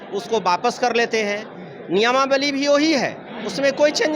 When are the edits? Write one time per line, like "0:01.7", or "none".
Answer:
none